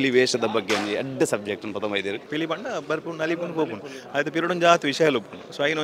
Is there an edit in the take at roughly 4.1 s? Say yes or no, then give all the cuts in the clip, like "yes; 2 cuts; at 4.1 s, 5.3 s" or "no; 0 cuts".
no; 1 cut; at 2.2 s